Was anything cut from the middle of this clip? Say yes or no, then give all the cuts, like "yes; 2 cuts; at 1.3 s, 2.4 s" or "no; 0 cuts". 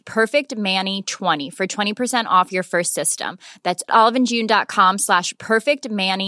no; 0 cuts